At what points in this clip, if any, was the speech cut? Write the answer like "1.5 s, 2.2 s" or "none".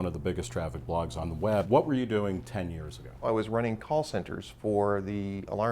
1.3 s, 3.2 s